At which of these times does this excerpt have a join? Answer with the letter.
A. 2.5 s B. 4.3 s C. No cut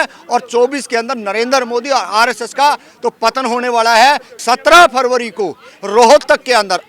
B